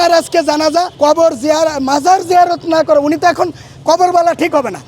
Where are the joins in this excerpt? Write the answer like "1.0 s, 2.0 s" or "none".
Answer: 0.9 s

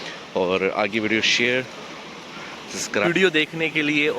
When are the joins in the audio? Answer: 3.1 s

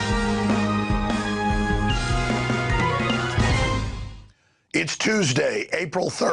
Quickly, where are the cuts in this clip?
none

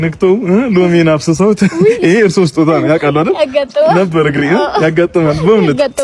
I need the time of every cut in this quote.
5.1 s

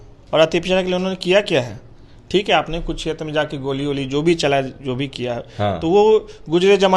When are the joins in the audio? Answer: none

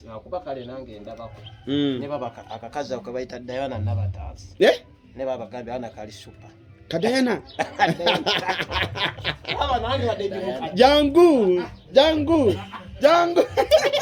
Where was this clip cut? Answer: none

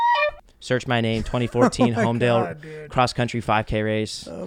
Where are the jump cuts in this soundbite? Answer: none

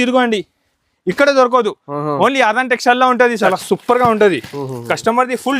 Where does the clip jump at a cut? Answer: 3.5 s

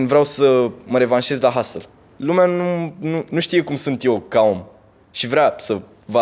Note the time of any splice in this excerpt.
2.0 s

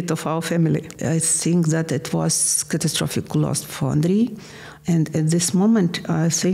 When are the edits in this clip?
0.9 s

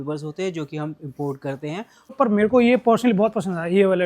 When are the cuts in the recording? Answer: 2.1 s

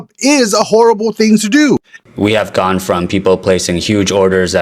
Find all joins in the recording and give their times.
2.0 s

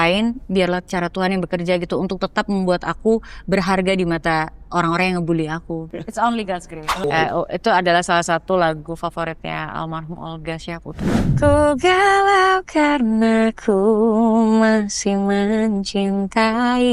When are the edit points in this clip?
5.9 s, 7.0 s, 11.1 s

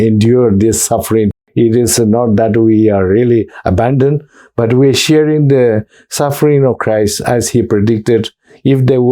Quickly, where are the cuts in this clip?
1.3 s

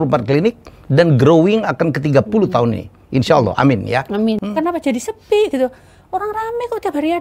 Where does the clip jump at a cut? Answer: 4.4 s

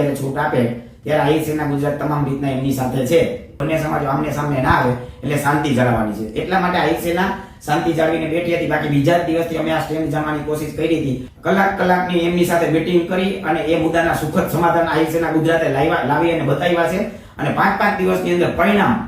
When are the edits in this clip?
3.6 s, 11.3 s

